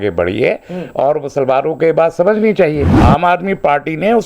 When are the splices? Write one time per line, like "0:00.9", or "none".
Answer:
0:02.9